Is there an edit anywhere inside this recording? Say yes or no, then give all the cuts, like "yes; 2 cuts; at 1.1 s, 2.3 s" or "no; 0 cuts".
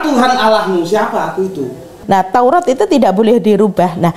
yes; 1 cut; at 1.9 s